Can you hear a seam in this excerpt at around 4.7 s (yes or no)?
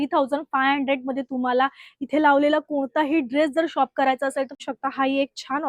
yes